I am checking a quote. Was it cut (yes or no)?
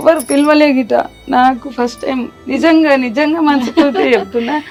no